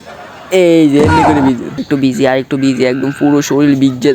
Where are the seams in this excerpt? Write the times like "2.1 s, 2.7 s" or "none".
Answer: 1.7 s